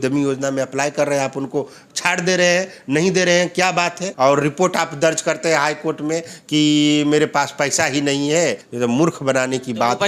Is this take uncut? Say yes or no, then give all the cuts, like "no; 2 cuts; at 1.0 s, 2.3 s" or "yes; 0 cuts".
no; 2 cuts; at 4.0 s, 8.7 s